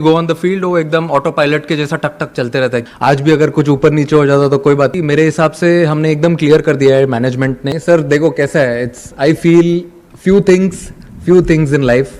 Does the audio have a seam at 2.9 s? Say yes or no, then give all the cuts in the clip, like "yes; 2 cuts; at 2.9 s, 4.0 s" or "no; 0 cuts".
yes; 3 cuts; at 2.9 s, 5.0 s, 7.7 s